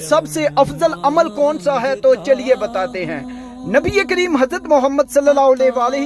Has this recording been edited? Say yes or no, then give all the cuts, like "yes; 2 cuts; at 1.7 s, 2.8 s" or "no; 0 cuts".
no; 0 cuts